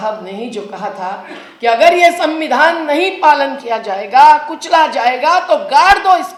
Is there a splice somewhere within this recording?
no; 0 cuts

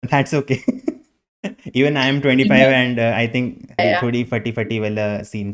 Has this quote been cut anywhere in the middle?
yes; 1 cut; at 3.8 s

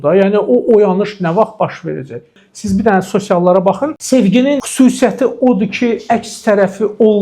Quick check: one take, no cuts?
no; 3 cuts; at 2.4 s, 4.0 s, 4.7 s

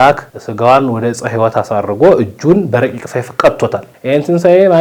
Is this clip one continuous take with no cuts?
no; 1 cut; at 3.9 s

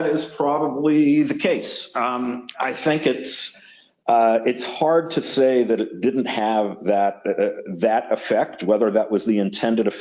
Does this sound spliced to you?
no; 0 cuts

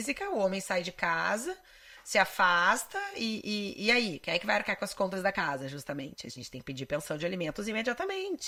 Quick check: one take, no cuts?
yes; 0 cuts

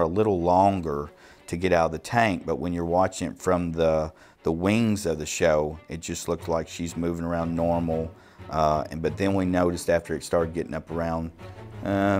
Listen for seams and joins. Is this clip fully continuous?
yes; 0 cuts

